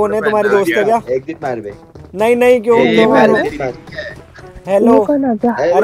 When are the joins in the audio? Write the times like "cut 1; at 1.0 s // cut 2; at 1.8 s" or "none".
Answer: none